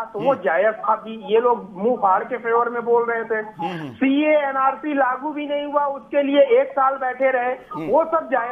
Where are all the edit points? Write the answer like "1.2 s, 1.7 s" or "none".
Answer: none